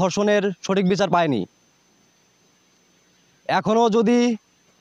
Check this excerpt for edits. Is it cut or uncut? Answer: uncut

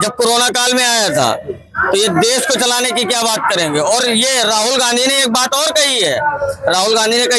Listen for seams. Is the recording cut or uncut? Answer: uncut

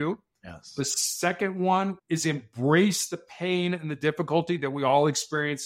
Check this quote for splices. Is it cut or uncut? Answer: cut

